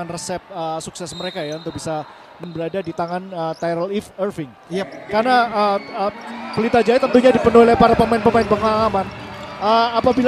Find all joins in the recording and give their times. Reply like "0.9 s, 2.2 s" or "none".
2.2 s